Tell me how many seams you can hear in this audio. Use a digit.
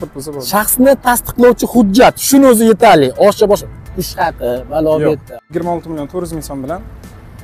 1